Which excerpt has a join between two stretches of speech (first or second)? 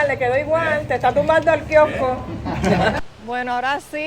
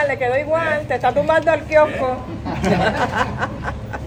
first